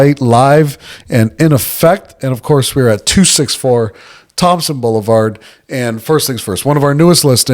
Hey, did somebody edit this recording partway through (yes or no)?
no